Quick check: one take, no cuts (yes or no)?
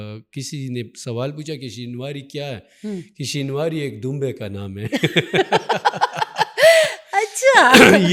yes